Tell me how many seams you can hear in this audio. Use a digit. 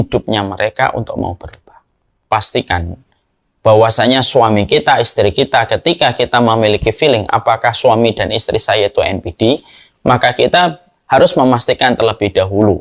1